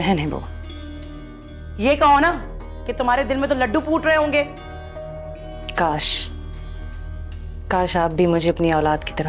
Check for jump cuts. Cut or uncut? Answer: uncut